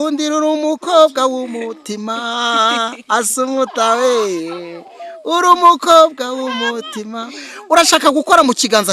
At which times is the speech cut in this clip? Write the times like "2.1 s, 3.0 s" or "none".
none